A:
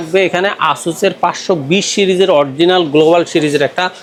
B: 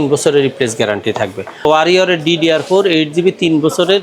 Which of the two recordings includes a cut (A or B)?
B